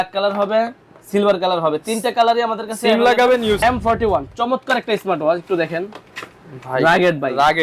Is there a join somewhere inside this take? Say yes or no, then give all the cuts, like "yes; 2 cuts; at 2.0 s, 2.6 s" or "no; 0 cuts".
yes; 1 cut; at 3.6 s